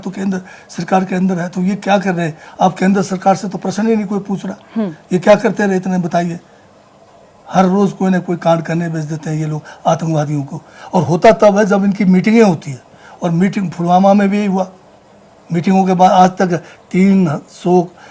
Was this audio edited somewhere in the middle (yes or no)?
no